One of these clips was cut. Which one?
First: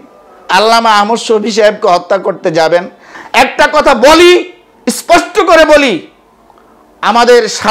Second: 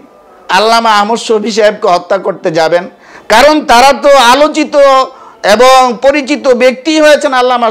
first; 1 cut; at 3.1 s

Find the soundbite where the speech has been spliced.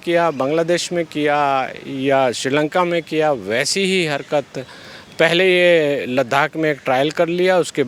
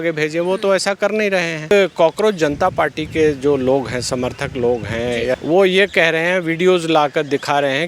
second; 2 cuts; at 1.7 s, 5.4 s

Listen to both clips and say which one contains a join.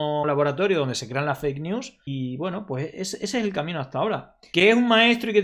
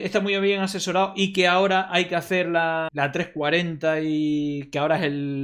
first; 1 cut; at 4.3 s

